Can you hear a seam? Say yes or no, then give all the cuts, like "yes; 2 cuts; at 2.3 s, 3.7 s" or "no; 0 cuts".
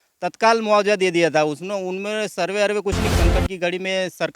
yes; 1 cut; at 3.1 s